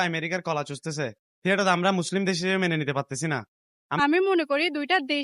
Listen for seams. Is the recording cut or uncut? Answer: cut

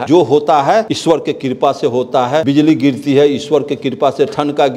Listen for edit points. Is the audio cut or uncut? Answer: cut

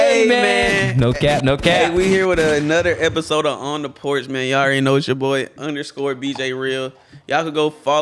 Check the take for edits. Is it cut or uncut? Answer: uncut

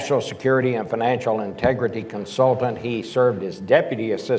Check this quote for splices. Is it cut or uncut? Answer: cut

